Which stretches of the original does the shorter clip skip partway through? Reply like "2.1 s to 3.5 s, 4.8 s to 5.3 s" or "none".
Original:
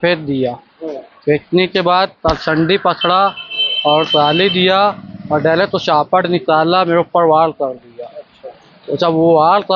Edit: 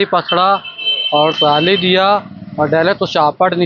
none